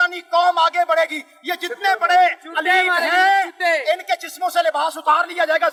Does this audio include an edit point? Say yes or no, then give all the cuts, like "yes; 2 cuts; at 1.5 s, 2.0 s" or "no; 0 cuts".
no; 0 cuts